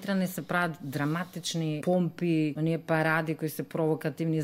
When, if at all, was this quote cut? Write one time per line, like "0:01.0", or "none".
0:01.8
0:02.6